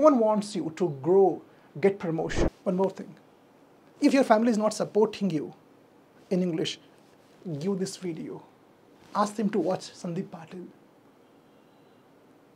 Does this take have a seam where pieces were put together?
yes; 1 cut; at 2.4 s

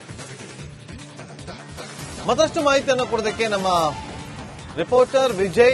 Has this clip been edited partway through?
yes; 1 cut; at 2.2 s

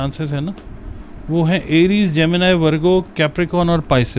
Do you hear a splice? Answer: no; 0 cuts

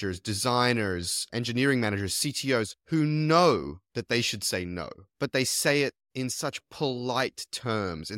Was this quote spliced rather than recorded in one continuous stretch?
no; 0 cuts

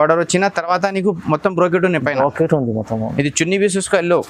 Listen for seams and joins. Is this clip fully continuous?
yes; 0 cuts

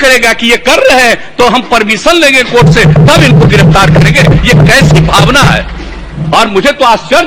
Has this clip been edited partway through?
no; 0 cuts

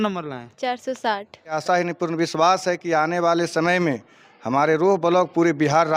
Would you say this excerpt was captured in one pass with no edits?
no; 1 cut; at 1.6 s

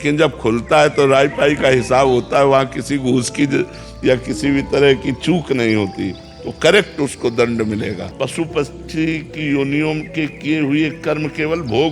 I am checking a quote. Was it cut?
yes; 1 cut; at 8.1 s

